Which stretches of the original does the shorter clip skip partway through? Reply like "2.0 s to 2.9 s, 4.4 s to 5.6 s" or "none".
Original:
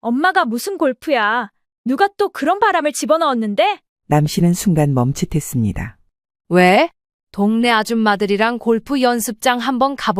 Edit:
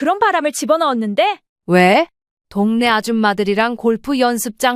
3.9 s to 6.3 s